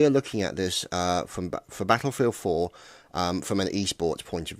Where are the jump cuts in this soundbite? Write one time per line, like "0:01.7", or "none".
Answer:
0:01.0